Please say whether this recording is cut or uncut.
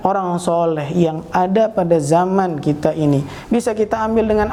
uncut